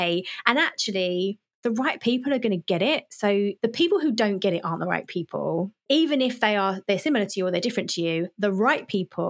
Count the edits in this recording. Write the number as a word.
three